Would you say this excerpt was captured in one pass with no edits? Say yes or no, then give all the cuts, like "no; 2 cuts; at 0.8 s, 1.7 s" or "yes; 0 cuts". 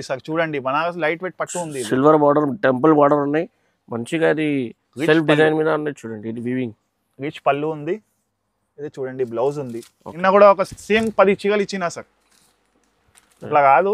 no; 1 cut; at 10.2 s